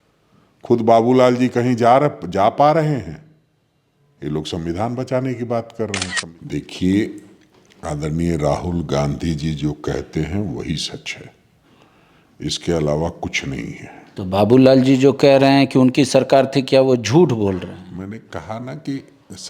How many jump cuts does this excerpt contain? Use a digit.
1